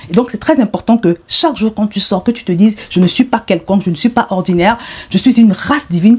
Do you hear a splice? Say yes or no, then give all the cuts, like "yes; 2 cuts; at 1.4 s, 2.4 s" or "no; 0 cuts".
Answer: no; 0 cuts